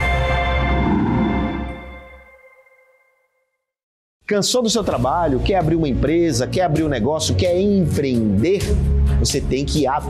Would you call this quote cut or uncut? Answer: cut